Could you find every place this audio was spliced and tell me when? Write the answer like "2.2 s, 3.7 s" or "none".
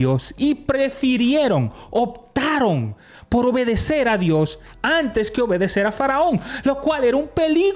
none